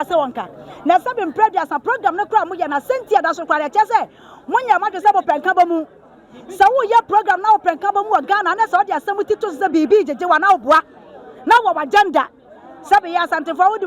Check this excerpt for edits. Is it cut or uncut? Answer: uncut